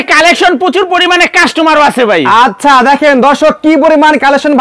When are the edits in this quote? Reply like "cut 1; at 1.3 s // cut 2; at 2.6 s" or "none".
none